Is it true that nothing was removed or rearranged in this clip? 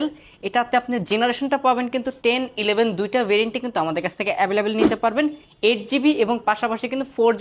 yes; 0 cuts

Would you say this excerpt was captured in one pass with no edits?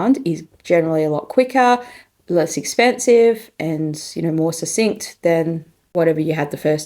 no; 1 cut; at 5.9 s

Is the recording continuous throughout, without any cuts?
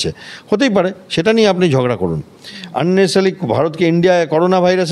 yes; 0 cuts

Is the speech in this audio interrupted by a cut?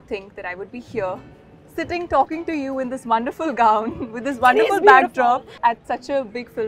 yes; 1 cut; at 5.6 s

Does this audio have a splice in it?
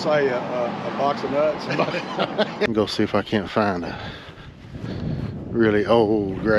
yes; 1 cut; at 2.7 s

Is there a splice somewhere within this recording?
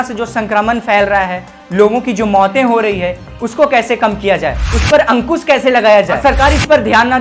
yes; 2 cuts; at 4.7 s, 6.2 s

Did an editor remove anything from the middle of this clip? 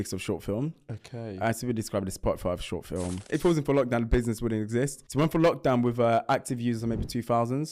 yes; 2 cuts; at 3.3 s, 5.0 s

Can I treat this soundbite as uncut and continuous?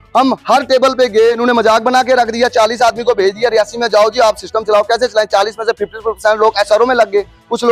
no; 1 cut; at 1.4 s

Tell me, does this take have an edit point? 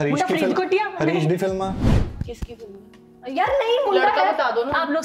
yes; 1 cut; at 1.8 s

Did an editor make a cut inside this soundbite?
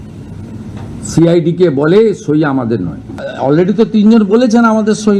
yes; 1 cut; at 3.3 s

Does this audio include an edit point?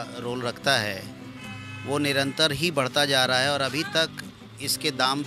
no; 0 cuts

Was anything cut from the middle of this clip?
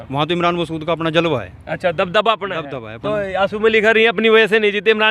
no; 0 cuts

